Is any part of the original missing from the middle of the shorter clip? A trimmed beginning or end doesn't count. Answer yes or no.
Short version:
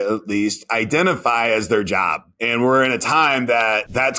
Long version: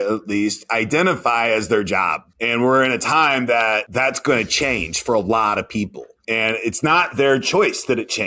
no